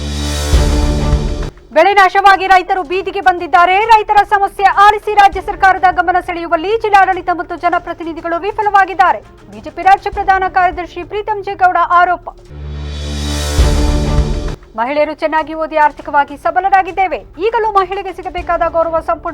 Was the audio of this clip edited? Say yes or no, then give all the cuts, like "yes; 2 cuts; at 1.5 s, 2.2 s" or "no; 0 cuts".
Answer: yes; 1 cut; at 1.5 s